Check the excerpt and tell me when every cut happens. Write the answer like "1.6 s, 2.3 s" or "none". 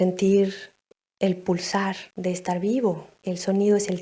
2.1 s, 3.2 s